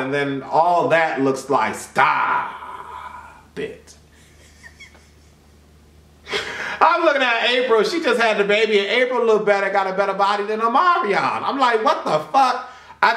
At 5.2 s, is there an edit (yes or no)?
no